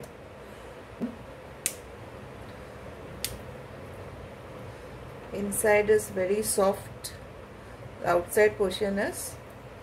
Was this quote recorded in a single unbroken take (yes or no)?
no